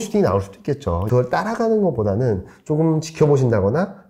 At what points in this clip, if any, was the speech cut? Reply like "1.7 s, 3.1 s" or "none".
1.0 s